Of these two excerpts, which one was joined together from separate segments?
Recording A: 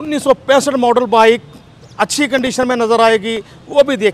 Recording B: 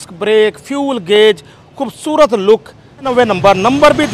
B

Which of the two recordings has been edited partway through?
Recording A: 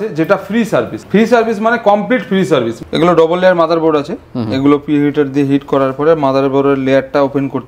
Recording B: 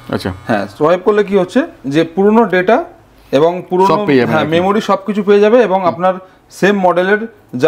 A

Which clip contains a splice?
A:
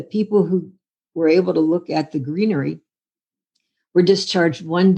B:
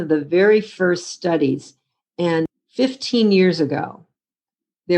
B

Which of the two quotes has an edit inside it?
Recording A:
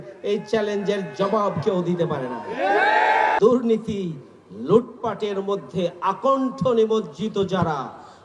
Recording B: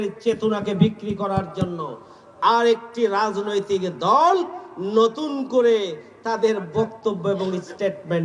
A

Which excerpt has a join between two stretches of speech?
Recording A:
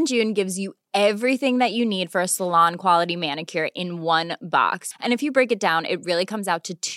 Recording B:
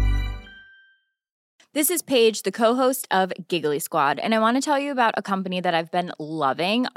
B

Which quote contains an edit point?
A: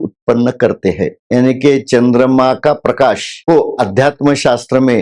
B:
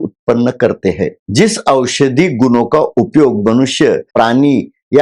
A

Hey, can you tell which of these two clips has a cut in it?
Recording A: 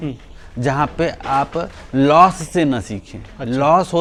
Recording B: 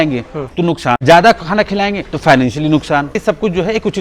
B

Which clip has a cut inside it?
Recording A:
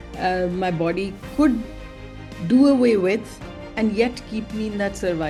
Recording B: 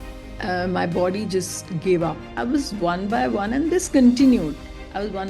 B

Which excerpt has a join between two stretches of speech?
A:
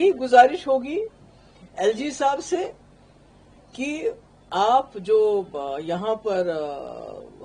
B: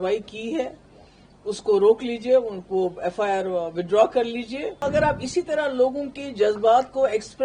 B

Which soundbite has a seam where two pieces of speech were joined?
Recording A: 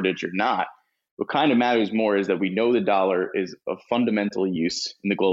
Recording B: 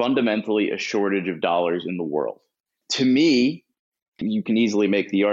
B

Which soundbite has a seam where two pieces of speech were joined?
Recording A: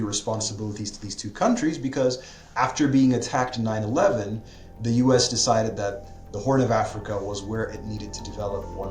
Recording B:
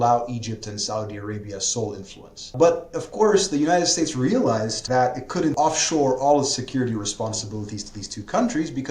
B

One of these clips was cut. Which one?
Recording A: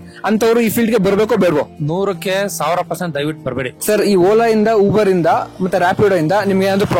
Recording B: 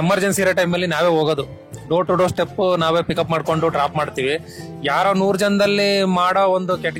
A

